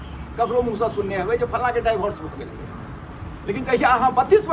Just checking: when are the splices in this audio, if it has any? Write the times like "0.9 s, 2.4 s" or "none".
none